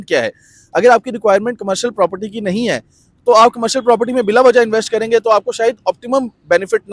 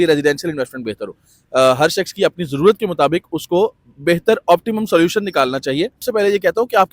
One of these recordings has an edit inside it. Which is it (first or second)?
second